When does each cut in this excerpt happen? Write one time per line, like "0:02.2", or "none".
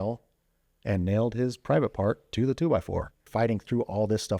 0:03.2